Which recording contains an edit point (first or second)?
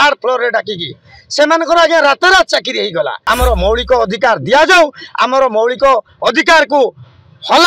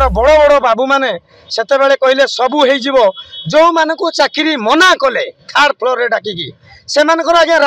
first